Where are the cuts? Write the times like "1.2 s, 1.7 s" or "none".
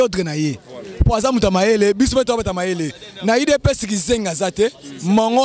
none

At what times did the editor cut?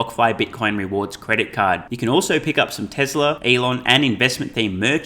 3.4 s

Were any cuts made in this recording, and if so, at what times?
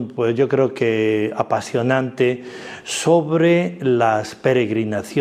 2.1 s

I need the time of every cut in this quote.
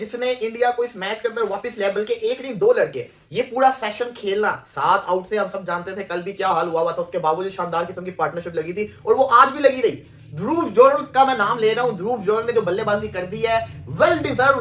none

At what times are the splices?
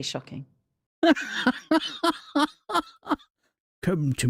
3.4 s

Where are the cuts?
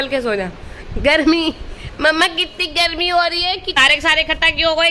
3.8 s

